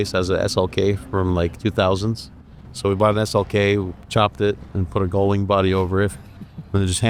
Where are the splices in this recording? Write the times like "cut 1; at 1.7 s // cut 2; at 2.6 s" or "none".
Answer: none